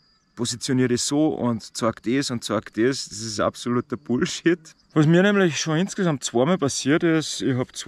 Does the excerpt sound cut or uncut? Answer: cut